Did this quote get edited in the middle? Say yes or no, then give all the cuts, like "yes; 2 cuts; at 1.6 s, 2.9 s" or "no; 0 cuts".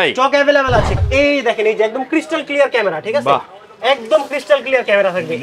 yes; 1 cut; at 1.0 s